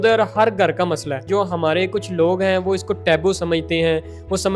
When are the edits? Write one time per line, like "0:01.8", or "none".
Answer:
0:01.2